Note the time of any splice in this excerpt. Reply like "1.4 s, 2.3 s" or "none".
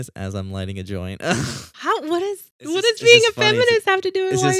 2.5 s